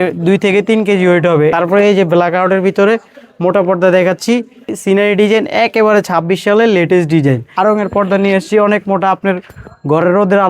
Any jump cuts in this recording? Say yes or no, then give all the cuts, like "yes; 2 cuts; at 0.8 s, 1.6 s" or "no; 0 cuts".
yes; 3 cuts; at 1.5 s, 4.7 s, 7.5 s